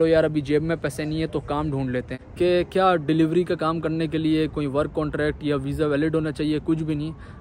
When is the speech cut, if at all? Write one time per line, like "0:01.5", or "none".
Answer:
0:02.2